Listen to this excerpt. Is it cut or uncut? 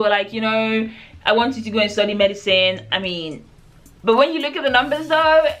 uncut